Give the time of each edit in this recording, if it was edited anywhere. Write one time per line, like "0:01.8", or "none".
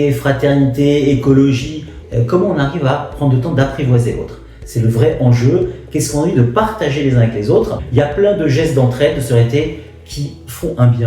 0:02.0
0:07.8